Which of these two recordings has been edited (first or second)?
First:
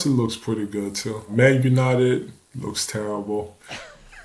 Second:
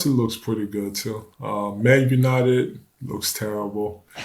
first